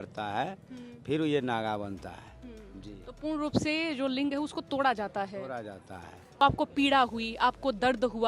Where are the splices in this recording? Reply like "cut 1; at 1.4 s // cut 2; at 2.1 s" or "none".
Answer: cut 1; at 6.4 s